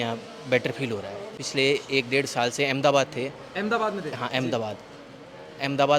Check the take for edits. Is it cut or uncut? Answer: cut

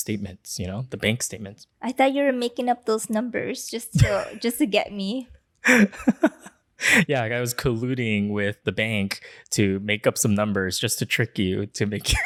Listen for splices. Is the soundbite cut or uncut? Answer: uncut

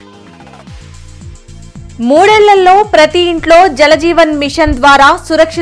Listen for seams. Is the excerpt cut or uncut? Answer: cut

